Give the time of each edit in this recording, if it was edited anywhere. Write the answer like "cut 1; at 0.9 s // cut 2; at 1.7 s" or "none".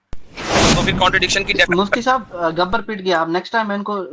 cut 1; at 1.7 s